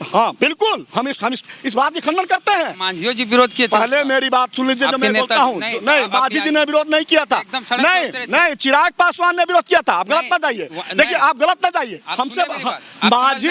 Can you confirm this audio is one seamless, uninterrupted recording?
yes; 0 cuts

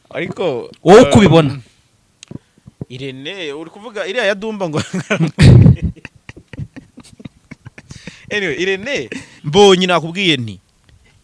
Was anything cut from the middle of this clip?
yes; 1 cut; at 9.3 s

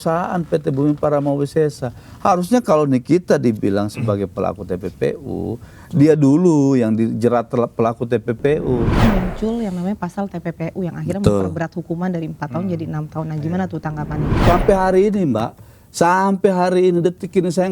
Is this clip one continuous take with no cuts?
no; 2 cuts; at 9.0 s, 14.4 s

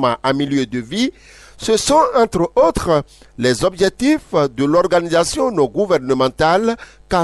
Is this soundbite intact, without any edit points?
yes; 0 cuts

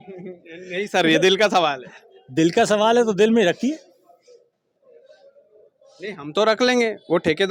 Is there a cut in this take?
no; 0 cuts

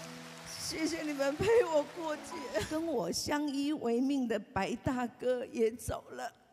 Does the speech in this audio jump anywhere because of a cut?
yes; 1 cut; at 2.7 s

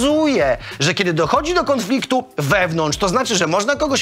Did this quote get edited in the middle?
no; 0 cuts

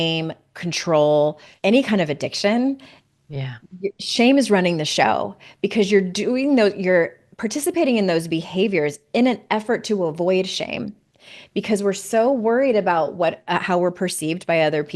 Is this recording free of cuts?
no; 1 cut; at 1.5 s

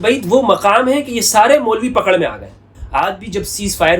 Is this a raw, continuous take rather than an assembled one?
no; 1 cut; at 2.7 s

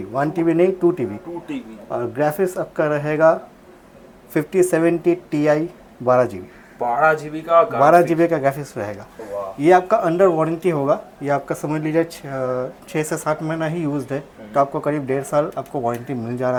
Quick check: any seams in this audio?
no; 0 cuts

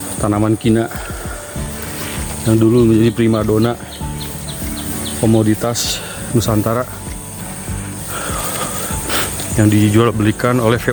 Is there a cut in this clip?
no; 0 cuts

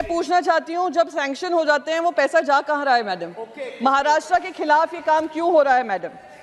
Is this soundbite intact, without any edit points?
yes; 0 cuts

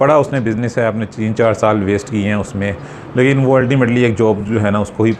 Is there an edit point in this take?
no; 0 cuts

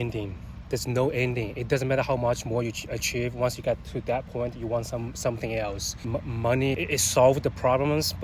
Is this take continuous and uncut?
no; 2 cuts; at 5.9 s, 6.8 s

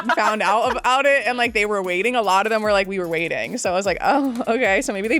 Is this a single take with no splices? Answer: yes; 0 cuts

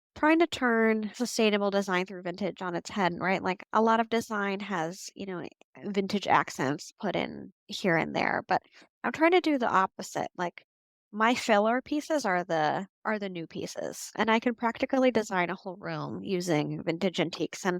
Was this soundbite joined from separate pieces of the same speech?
yes; 1 cut; at 1.1 s

